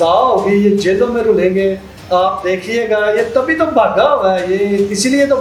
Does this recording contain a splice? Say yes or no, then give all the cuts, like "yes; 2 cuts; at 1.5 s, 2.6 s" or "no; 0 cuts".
no; 0 cuts